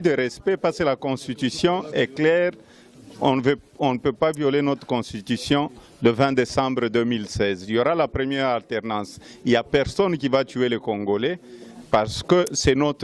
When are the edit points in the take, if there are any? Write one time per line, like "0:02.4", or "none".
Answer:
none